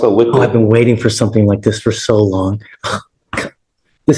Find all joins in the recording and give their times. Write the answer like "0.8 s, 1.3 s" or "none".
none